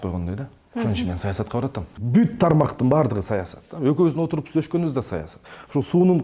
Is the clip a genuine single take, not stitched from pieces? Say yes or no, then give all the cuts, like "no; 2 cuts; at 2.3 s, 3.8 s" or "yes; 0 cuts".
no; 1 cut; at 2.0 s